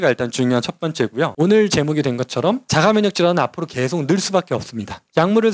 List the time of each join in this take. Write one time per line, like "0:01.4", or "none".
0:01.3